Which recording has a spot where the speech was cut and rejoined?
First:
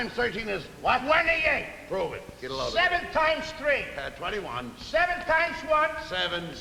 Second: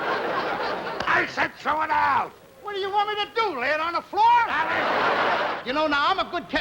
second; 1 cut; at 5.5 s

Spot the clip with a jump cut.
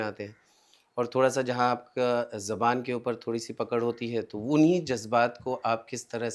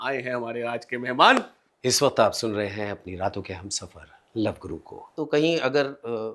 second; 2 cuts; at 1.6 s, 5.0 s

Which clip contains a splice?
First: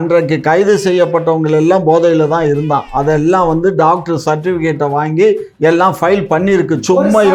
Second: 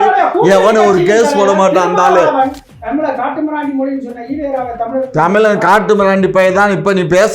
second; 1 cut; at 2.6 s

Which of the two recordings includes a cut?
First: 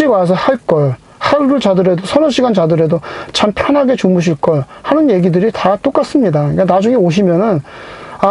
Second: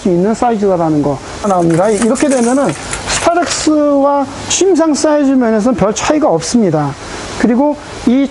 second; 1 cut; at 1.4 s

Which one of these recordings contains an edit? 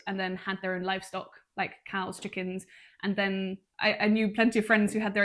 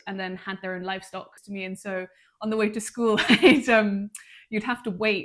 second; 1 cut; at 1.4 s

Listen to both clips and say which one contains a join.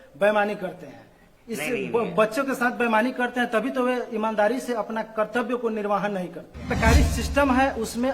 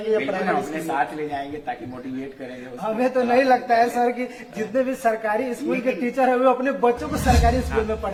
first; 1 cut; at 6.8 s

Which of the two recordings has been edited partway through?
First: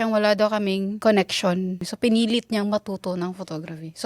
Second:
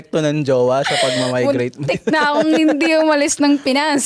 first; 2 cuts; at 0.9 s, 1.9 s

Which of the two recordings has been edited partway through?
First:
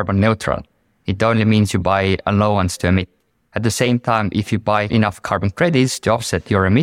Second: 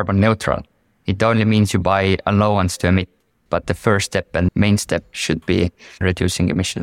second; 2 cuts; at 3.4 s, 5.9 s

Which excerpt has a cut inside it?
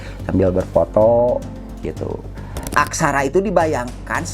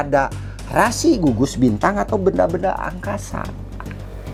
first; 1 cut; at 2.6 s

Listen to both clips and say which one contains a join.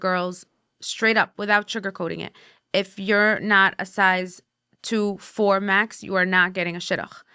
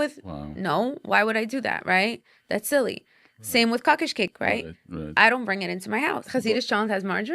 second; 2 cuts; at 4.3 s, 6.2 s

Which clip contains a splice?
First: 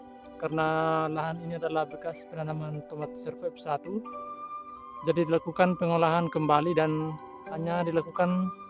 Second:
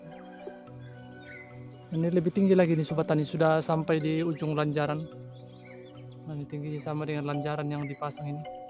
second; 1 cut; at 1.9 s

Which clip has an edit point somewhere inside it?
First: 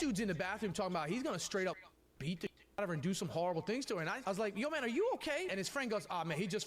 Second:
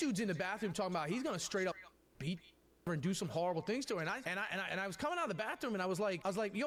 first; 2 cuts; at 4.2 s, 5.5 s

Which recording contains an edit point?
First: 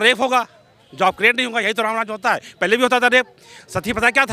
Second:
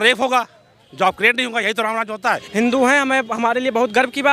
second; 1 cut; at 2.4 s

